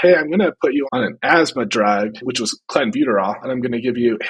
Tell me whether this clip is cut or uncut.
cut